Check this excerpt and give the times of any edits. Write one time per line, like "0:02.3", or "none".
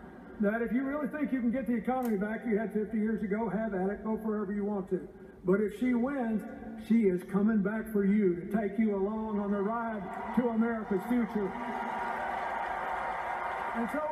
0:02.2